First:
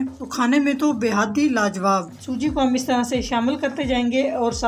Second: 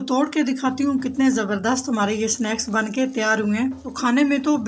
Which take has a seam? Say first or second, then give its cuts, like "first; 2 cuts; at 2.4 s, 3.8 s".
first; 1 cut; at 2.2 s